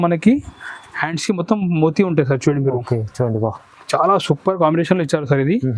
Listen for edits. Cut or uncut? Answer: uncut